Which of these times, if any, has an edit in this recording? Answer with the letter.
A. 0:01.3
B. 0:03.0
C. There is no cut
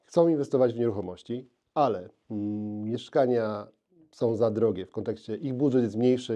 C